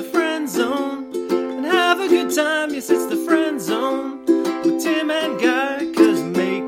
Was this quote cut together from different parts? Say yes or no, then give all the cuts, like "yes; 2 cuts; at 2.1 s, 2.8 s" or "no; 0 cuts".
no; 0 cuts